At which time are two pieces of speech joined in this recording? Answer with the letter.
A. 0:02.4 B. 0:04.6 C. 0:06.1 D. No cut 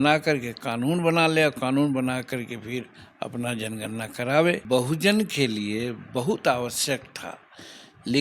B